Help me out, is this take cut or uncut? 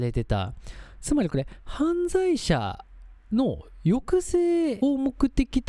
cut